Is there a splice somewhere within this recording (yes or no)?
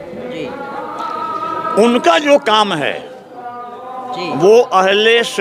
no